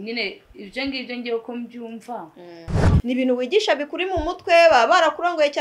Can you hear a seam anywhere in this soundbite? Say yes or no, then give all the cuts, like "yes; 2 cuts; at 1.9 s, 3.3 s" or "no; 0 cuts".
yes; 1 cut; at 2.9 s